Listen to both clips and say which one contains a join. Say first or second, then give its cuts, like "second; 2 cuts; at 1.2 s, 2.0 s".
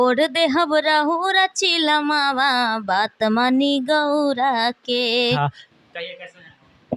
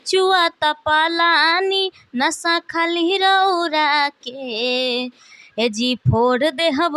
first; 1 cut; at 5.4 s